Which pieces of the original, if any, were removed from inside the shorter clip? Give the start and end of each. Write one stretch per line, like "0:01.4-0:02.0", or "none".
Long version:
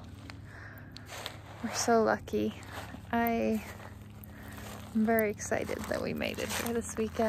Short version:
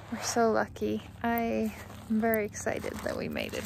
0:02.6-0:03.0
0:03.8-0:04.7